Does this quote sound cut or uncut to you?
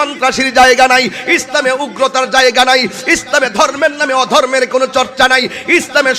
uncut